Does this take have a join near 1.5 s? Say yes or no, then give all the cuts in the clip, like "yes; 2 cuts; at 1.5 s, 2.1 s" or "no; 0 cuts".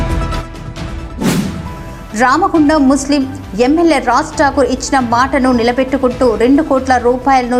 yes; 1 cut; at 1.5 s